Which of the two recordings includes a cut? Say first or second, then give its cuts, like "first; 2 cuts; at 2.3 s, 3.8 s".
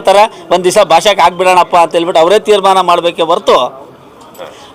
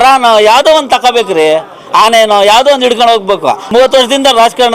second; 1 cut; at 3.6 s